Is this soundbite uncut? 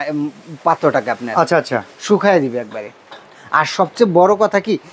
yes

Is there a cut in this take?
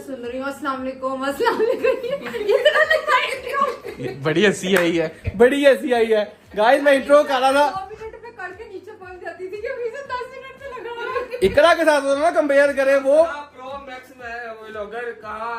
no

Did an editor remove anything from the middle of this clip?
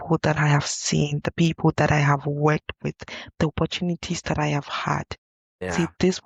no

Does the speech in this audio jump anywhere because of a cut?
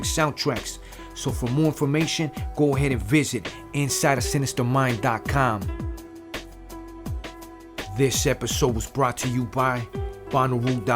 yes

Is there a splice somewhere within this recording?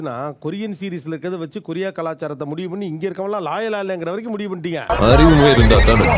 no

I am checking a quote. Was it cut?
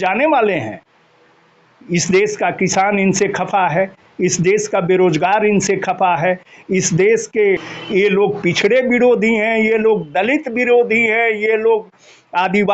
yes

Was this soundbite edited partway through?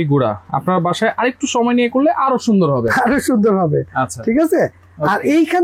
no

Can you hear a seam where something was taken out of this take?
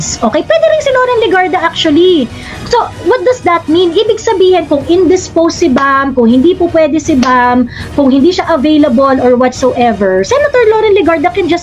no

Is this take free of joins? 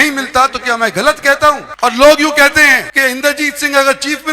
no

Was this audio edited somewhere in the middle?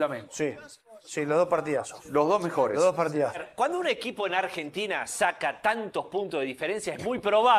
yes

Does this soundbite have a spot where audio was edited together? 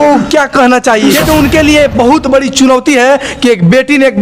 yes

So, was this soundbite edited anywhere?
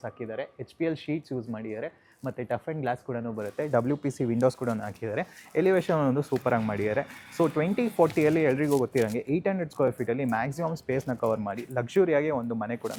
no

